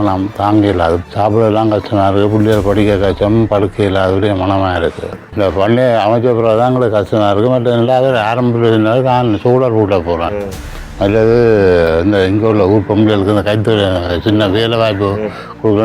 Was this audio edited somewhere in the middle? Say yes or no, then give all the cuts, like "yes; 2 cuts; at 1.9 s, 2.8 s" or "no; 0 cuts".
yes; 1 cut; at 5.2 s